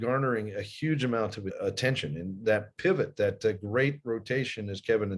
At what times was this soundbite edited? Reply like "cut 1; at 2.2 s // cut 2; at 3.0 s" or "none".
cut 1; at 1.5 s